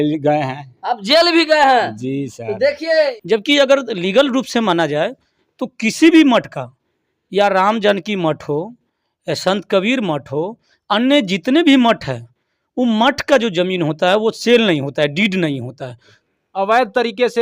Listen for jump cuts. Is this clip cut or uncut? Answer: cut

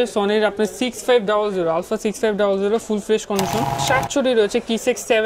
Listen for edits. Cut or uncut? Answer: cut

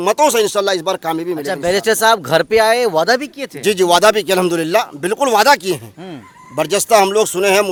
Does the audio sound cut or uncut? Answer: uncut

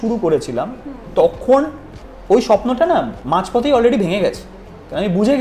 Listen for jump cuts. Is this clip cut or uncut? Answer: uncut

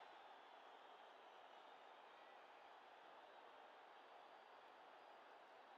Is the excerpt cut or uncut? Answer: uncut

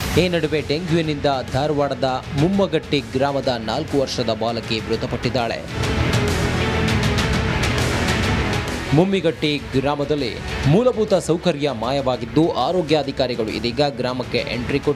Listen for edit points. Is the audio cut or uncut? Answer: cut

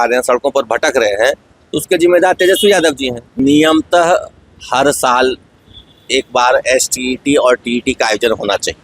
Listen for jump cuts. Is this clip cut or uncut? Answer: cut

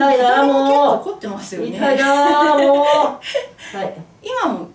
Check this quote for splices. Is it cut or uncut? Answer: uncut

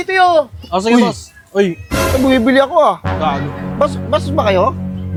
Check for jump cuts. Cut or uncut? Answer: uncut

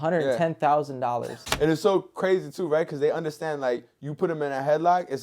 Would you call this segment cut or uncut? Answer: cut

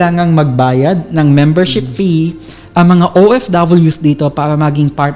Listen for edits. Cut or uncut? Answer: uncut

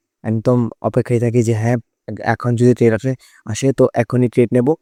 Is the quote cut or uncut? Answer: uncut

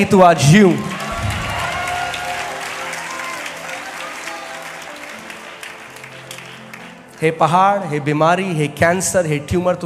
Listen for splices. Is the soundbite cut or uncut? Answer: uncut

